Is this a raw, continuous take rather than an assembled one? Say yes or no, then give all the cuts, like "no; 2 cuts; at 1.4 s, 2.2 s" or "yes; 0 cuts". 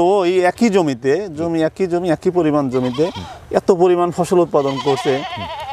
yes; 0 cuts